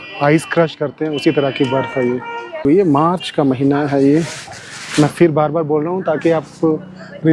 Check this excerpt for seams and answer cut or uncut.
cut